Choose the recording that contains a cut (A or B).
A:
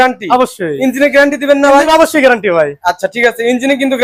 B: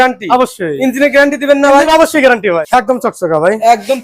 B